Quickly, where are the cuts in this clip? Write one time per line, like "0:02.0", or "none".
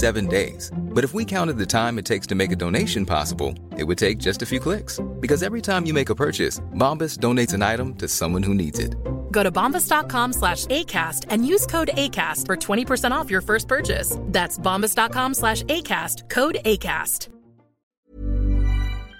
0:17.9